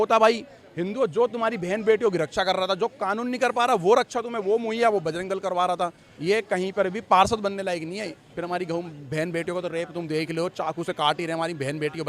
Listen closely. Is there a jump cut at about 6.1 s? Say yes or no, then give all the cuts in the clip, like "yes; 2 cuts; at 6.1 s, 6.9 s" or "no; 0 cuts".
yes; 2 cuts; at 6.1 s, 8.3 s